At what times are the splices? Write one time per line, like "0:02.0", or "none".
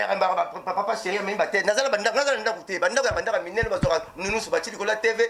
none